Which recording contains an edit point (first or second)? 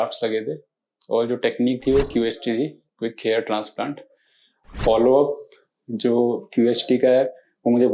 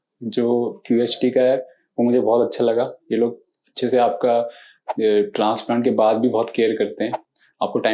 first